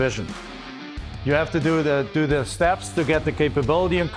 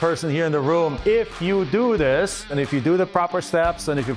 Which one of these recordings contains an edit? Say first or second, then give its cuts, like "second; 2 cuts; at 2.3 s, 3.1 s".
second; 1 cut; at 2.5 s